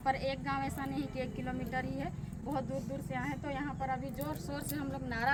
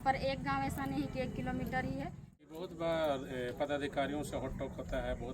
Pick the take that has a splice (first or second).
second